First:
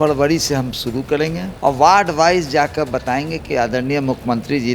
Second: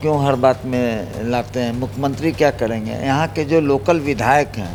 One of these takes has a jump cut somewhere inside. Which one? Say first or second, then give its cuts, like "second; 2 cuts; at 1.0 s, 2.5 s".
first; 1 cut; at 1.5 s